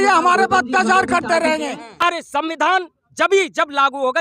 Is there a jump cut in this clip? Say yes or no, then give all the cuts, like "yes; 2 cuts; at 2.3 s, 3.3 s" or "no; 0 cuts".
yes; 1 cut; at 2.0 s